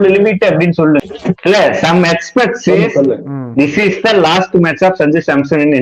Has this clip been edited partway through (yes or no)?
yes